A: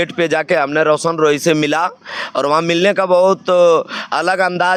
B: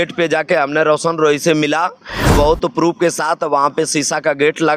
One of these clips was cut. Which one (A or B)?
B